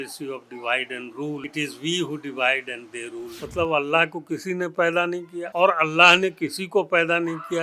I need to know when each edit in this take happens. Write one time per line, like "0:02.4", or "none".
0:03.4